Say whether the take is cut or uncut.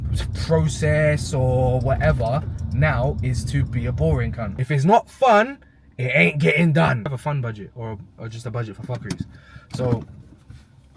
cut